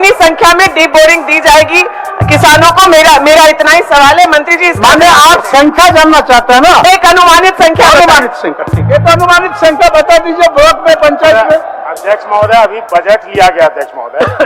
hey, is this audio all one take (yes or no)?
yes